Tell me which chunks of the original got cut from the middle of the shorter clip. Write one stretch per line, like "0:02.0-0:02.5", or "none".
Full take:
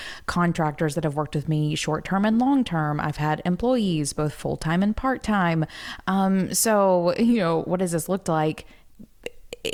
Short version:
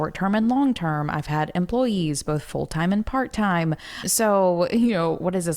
0:06.0-0:06.5